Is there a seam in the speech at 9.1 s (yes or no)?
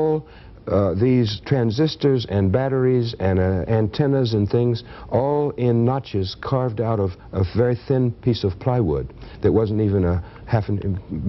no